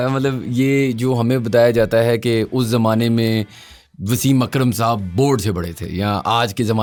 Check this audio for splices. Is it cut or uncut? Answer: uncut